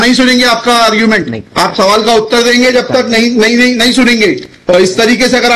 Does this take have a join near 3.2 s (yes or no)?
no